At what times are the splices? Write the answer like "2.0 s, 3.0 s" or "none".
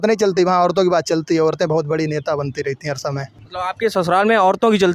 none